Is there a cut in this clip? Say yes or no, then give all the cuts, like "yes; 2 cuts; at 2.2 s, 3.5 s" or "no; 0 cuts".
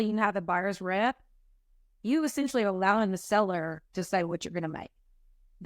no; 0 cuts